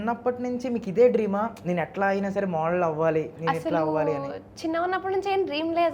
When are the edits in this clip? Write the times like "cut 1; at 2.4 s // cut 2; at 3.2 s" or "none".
none